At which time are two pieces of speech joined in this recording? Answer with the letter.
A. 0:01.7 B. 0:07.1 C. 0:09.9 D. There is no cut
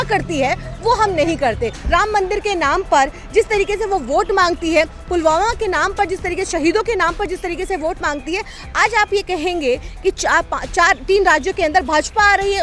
A